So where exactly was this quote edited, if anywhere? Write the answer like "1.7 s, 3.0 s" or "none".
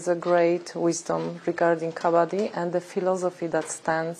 none